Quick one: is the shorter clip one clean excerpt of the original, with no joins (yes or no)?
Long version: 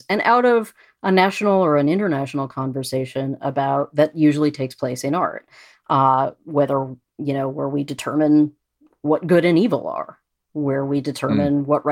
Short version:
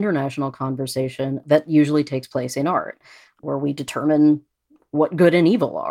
no